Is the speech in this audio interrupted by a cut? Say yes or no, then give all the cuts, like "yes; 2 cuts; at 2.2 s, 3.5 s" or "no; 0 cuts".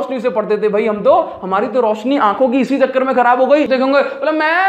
yes; 1 cut; at 3.7 s